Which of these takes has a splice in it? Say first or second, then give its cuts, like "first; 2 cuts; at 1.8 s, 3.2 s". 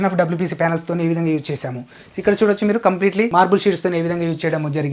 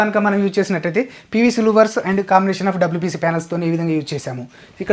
first; 1 cut; at 3.3 s